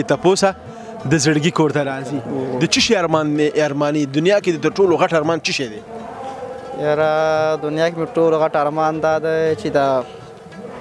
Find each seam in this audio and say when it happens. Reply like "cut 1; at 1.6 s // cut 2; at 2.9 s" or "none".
none